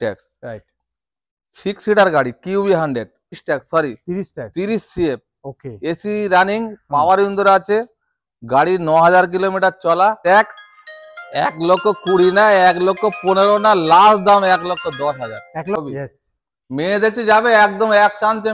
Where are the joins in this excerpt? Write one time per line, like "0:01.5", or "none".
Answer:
0:03.4
0:10.2
0:15.8